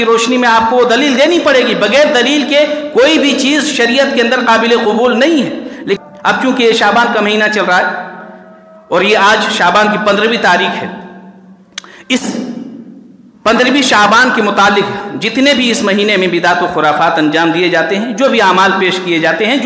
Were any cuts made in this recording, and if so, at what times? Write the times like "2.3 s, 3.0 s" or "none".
6.0 s